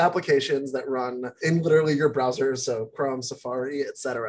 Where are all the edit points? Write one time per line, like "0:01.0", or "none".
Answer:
0:01.4